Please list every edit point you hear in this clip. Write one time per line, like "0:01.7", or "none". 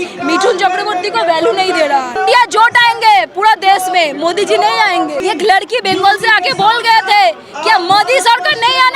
0:02.2
0:05.2

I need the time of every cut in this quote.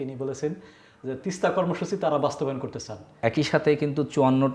0:03.2

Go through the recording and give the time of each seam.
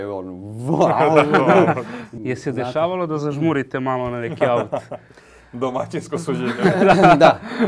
0:02.0

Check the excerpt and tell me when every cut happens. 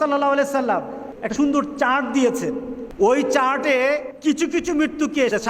0:01.2
0:02.8
0:04.1

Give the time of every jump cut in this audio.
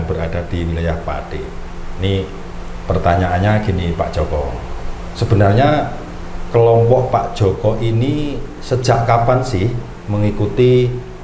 none

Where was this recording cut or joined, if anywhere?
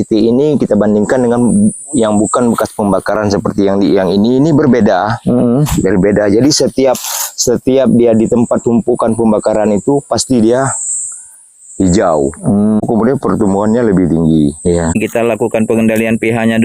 0:12.8
0:15.0

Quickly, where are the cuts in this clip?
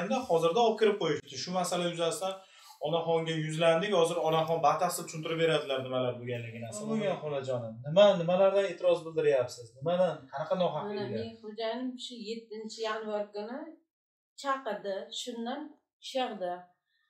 none

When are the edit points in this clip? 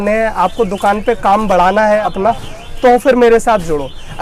0:02.0

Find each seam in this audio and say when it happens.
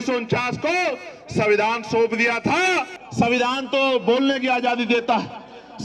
0:03.0

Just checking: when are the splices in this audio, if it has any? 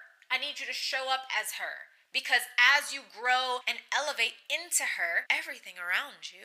0:03.7

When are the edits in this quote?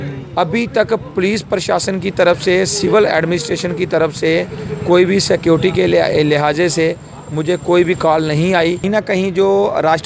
0:08.8

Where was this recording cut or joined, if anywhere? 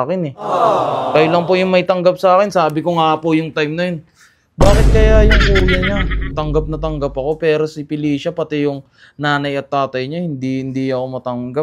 none

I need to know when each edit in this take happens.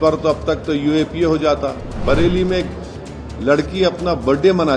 0:01.9

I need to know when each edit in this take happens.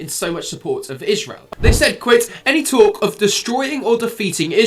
0:01.4

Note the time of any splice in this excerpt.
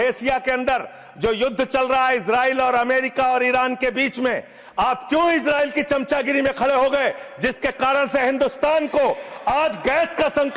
none

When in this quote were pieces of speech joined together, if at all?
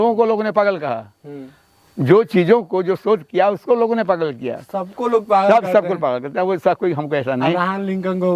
none

